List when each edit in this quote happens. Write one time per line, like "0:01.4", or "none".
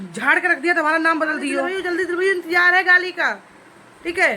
0:01.7